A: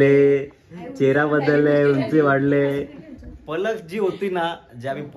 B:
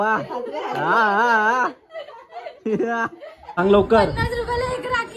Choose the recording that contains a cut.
B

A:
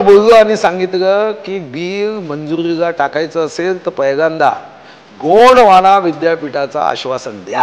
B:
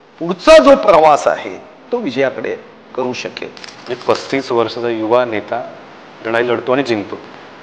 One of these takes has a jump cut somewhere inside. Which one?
B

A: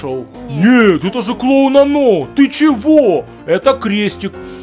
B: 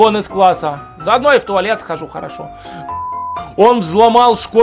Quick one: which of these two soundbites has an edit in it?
B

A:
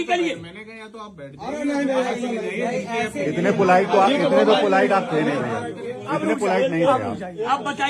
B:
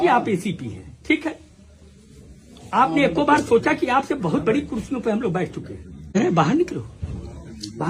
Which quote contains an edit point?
B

